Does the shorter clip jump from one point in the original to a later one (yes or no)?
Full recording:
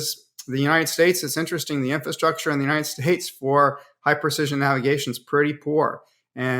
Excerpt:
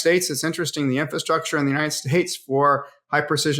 no